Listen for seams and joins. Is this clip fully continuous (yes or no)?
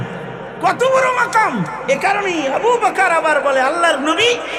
yes